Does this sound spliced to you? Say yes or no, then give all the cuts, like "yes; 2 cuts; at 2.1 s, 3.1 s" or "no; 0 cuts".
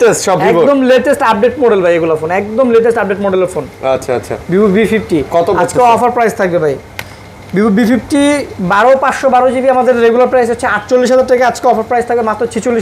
no; 0 cuts